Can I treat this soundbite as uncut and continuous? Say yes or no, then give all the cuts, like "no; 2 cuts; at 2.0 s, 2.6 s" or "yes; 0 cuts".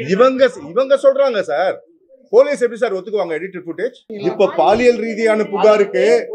no; 1 cut; at 4.1 s